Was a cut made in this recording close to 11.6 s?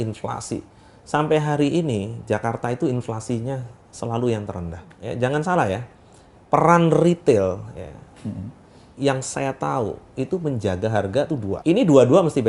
yes; 2 cuts; at 5.0 s, 11.6 s

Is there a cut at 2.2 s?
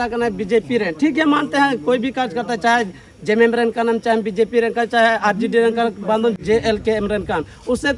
no; 1 cut; at 6.4 s

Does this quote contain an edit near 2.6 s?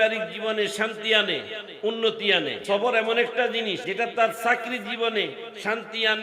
yes; 2 cuts; at 2.6 s, 3.8 s

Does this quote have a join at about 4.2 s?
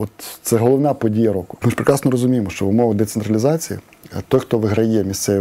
no; 1 cut; at 1.5 s

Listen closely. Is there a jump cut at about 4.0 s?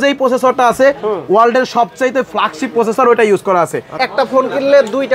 yes; 1 cut; at 4.0 s

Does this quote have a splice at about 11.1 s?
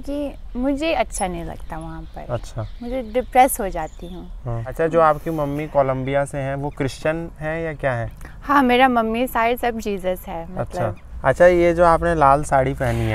yes; 2 cuts; at 4.7 s, 11.1 s

